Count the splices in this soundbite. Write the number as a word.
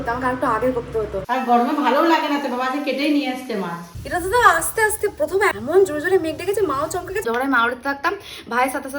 three